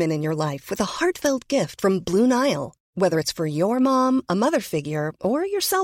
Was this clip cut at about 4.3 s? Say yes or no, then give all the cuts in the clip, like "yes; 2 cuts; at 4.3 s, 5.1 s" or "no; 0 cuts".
no; 0 cuts